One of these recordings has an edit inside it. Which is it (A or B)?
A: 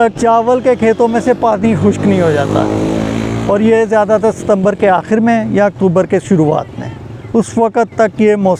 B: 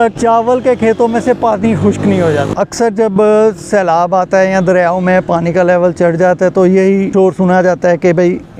B